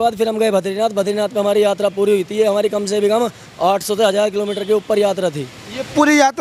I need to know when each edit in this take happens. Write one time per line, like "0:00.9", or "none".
none